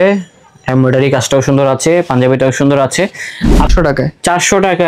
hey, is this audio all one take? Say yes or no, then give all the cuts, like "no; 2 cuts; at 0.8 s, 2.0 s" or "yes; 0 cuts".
no; 1 cut; at 3.7 s